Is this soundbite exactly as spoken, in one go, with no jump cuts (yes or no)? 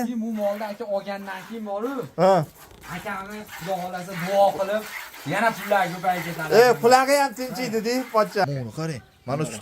no